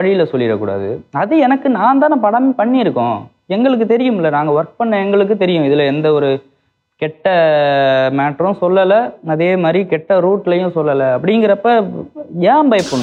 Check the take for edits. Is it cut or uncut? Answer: uncut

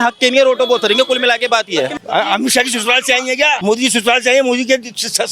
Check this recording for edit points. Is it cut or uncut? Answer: cut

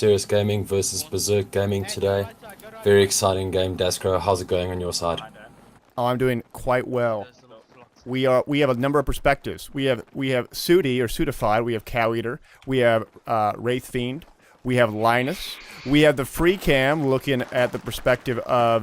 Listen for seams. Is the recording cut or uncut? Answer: cut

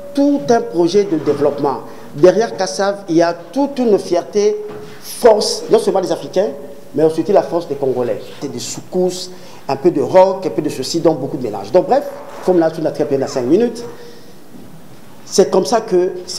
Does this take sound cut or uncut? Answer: cut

